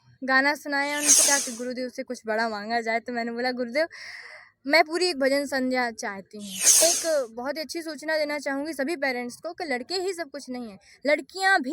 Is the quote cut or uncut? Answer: cut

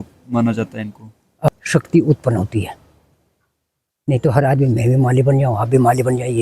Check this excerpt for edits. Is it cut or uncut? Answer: cut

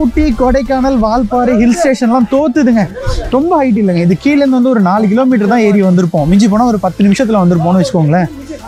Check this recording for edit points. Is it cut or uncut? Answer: uncut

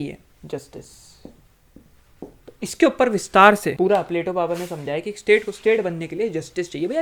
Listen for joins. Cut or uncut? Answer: cut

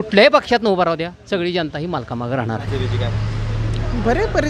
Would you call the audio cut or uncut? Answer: cut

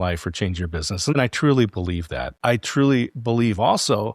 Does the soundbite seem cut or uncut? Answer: cut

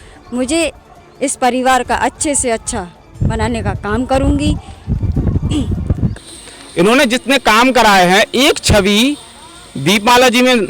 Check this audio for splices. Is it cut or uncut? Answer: cut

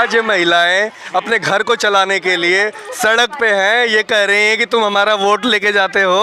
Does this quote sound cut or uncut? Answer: uncut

